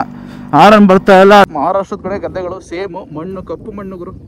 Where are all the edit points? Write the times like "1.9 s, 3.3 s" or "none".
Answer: 1.5 s